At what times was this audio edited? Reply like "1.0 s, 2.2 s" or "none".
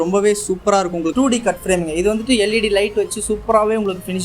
1.1 s